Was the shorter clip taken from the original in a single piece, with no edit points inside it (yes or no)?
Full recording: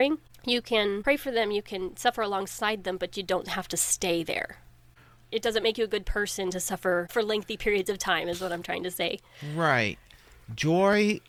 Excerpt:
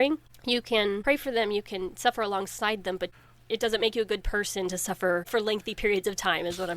no